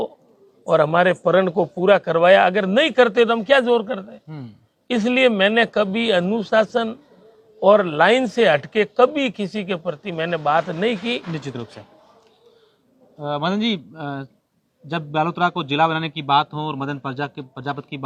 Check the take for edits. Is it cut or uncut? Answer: uncut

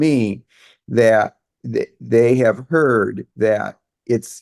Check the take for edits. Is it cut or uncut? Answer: cut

